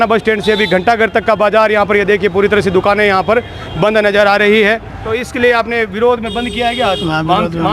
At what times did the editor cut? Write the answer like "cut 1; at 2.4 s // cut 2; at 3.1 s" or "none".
cut 1; at 5.0 s